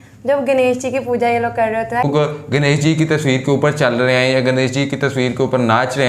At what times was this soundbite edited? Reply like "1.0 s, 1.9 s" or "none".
2.0 s

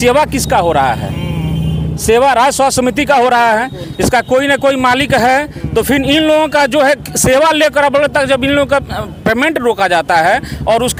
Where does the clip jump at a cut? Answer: none

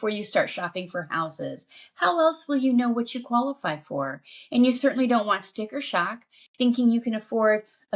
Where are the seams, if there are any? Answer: none

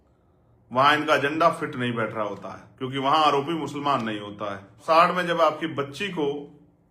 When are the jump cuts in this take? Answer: 4.8 s

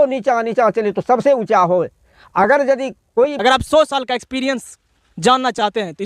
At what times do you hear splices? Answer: 3.4 s

